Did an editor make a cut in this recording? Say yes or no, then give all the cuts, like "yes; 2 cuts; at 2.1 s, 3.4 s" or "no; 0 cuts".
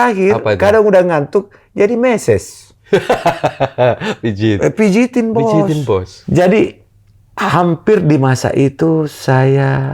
yes; 1 cut; at 6.2 s